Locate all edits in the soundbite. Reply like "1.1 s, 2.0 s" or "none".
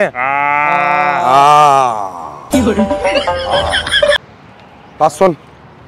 4.3 s